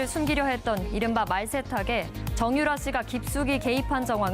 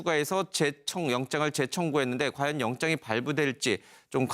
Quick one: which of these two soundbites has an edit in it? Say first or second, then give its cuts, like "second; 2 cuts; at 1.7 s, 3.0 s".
first; 1 cut; at 1.5 s